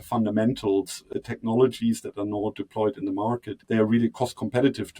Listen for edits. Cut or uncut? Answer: cut